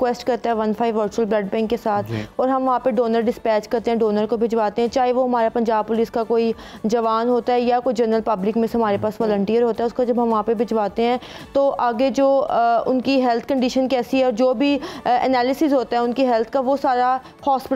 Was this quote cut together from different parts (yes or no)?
no